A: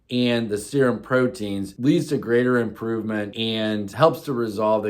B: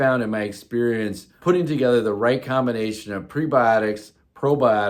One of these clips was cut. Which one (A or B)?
A